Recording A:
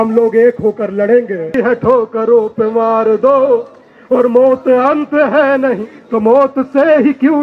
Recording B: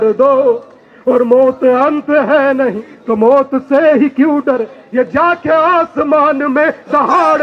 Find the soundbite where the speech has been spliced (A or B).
A